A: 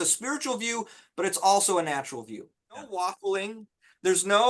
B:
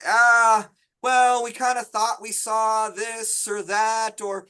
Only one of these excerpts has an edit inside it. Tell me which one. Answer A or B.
A